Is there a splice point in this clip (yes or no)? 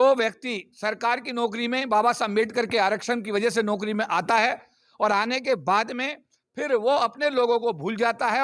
no